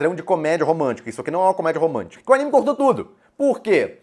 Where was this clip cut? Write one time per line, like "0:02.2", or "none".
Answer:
0:02.1

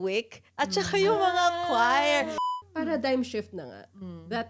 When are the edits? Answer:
0:02.4

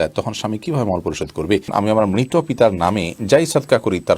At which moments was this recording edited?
0:01.7

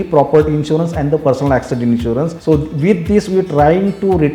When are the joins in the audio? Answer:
0:02.4

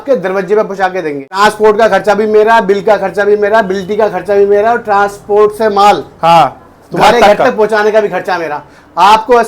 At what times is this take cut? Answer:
0:01.3

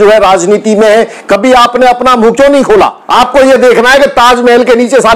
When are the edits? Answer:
0:03.0

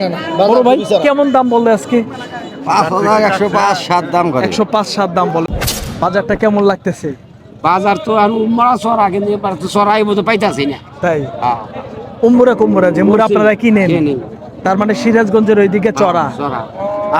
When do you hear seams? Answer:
0:05.5

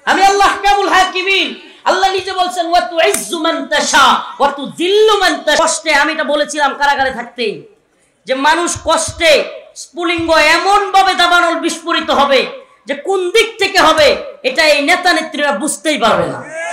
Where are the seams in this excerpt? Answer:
0:05.6

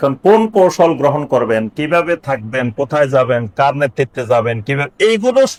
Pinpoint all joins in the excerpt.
none

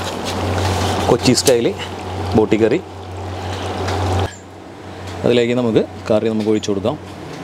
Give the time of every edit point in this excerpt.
0:04.3

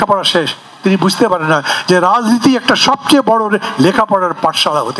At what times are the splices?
none

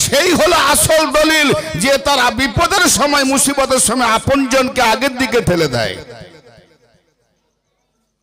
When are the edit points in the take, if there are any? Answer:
none

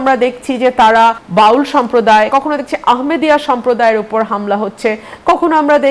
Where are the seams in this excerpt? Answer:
0:01.2
0:02.3

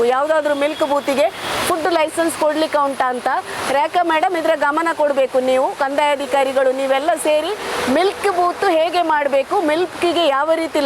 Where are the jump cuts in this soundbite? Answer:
none

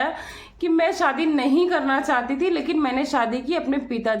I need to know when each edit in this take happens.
none

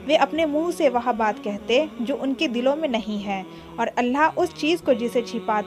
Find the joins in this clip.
none

